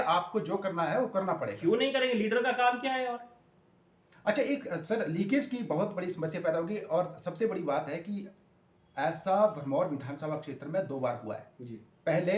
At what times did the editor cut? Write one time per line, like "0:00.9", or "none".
none